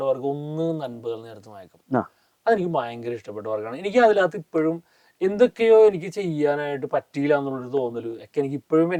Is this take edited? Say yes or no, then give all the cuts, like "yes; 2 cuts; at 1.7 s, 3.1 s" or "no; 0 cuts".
no; 0 cuts